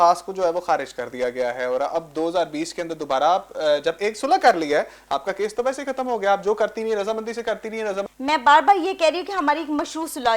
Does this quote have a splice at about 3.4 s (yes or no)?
no